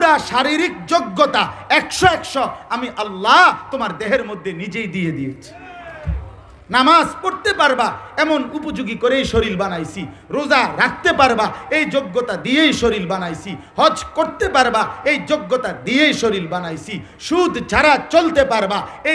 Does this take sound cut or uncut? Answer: uncut